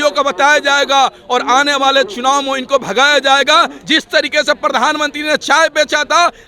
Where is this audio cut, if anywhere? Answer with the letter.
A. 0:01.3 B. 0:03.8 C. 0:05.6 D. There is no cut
B